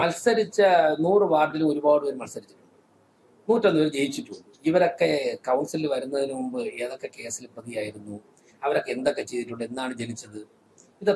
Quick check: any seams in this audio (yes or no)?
no